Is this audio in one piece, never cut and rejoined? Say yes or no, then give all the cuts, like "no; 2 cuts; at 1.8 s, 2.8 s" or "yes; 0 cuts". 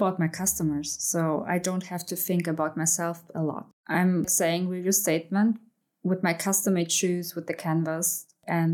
no; 2 cuts; at 3.7 s, 5.7 s